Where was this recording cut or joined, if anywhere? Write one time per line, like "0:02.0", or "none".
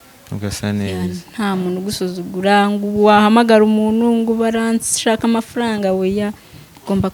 none